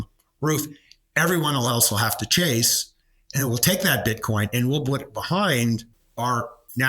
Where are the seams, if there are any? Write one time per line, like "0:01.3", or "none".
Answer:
0:06.0